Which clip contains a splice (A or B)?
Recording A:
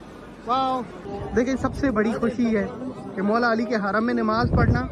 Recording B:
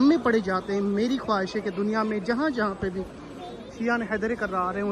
A